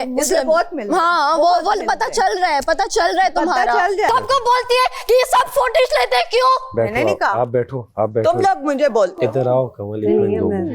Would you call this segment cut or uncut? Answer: cut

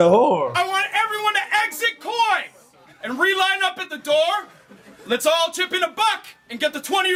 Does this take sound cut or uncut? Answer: uncut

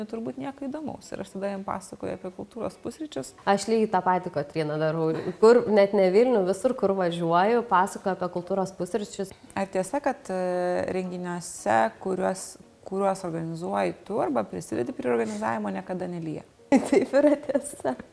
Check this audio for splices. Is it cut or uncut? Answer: cut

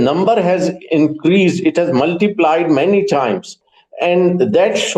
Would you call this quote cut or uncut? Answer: uncut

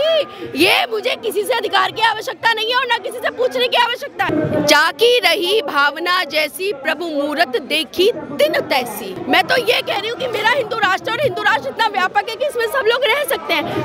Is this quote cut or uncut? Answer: cut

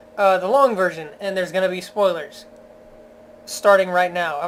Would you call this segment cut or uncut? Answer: uncut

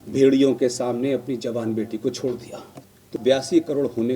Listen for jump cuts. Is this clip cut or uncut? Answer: cut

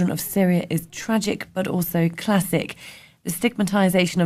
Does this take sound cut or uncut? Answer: uncut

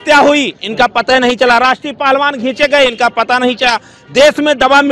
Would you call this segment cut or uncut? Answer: uncut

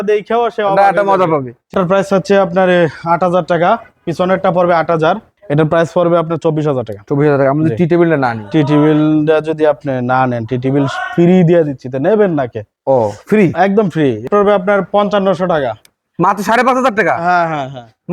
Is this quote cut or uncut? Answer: cut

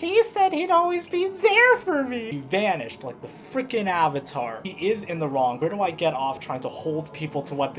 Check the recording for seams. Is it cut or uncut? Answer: cut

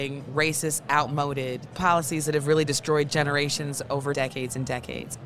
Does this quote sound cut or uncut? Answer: cut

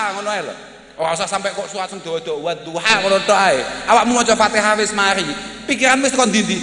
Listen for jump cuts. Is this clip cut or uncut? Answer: uncut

